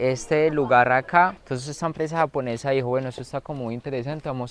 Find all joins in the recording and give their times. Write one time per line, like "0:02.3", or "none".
0:01.4